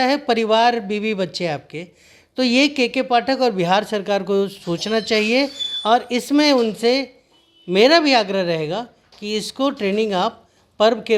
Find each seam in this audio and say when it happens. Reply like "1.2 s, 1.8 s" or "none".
none